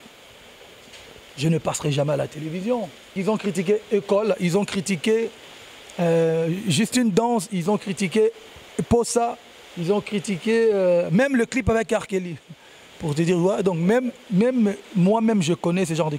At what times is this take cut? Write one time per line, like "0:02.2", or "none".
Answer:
0:03.1